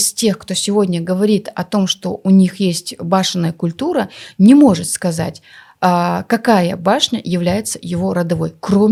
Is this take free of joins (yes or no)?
yes